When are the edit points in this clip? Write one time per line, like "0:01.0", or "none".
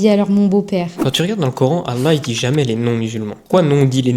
0:01.0